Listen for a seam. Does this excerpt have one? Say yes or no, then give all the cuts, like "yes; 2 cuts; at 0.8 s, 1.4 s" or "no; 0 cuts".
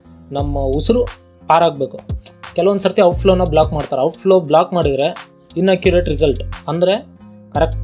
no; 0 cuts